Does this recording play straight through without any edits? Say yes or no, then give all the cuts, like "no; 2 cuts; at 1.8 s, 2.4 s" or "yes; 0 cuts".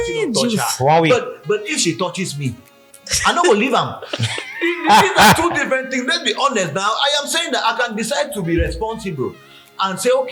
yes; 0 cuts